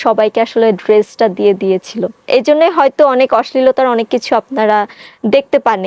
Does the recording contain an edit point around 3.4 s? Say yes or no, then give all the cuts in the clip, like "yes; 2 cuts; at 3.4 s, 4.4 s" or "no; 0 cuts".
no; 1 cut; at 2.2 s